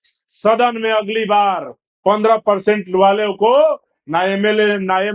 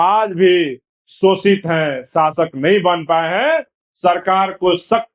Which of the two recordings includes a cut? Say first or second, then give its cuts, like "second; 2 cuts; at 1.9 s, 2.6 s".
second; 1 cut; at 3.8 s